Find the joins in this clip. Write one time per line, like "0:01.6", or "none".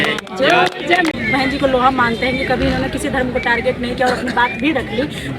0:01.1